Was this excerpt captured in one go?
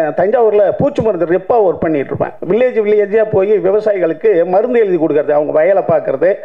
no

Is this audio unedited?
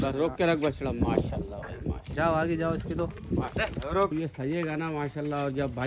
no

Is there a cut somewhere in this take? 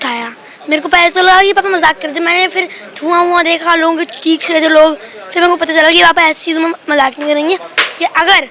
no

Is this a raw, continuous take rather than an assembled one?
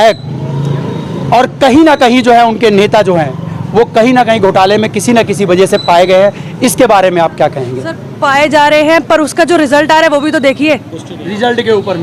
yes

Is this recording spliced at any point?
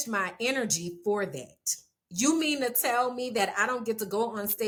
no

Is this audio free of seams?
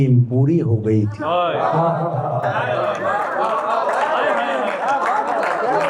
yes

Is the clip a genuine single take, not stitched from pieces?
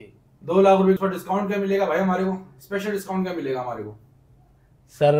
no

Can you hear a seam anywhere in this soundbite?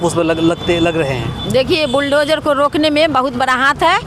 no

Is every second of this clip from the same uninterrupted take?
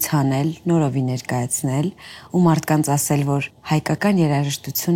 no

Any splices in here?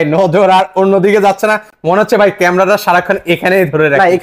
no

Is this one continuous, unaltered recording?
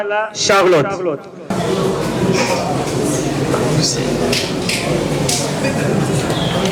yes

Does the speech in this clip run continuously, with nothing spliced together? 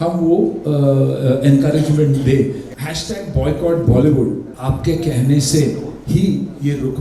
no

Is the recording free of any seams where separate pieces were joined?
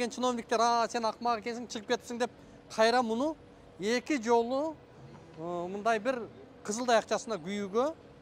yes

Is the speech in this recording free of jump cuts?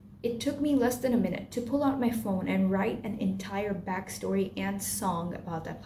yes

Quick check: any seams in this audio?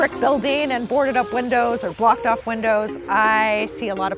no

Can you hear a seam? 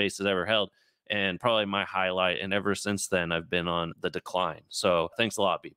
no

